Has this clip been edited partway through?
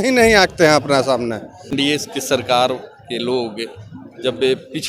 yes; 1 cut; at 1.7 s

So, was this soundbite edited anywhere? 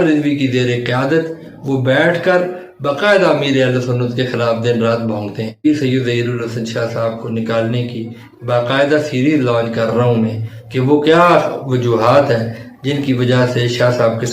yes; 1 cut; at 5.6 s

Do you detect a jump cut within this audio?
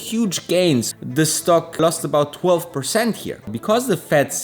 yes; 3 cuts; at 0.9 s, 1.8 s, 3.5 s

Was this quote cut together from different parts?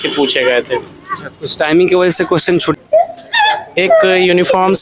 yes; 1 cut; at 2.8 s

